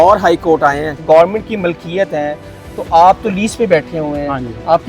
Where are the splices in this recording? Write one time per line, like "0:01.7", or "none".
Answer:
0:00.9